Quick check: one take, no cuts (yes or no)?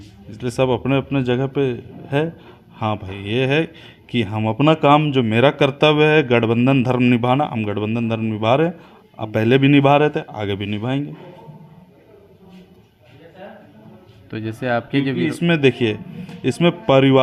yes